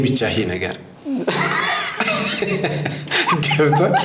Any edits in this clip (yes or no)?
no